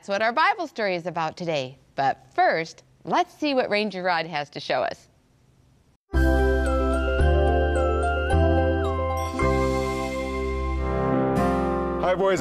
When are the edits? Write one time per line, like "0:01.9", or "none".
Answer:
0:06.7